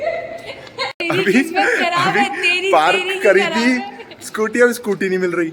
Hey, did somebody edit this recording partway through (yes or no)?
yes